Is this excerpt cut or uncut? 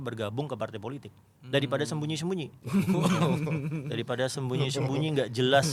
uncut